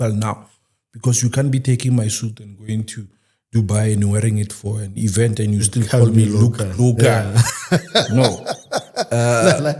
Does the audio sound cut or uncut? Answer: uncut